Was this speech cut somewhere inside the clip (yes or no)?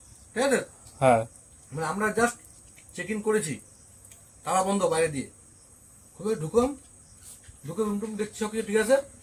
no